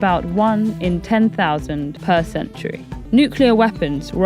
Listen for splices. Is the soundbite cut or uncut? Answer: cut